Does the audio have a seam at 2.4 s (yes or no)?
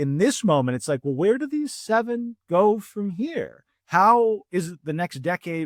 no